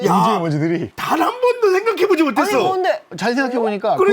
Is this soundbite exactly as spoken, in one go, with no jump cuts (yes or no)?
no